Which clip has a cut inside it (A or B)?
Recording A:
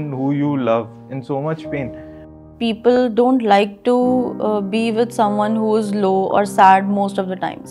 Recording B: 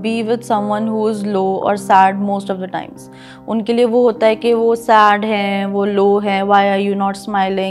A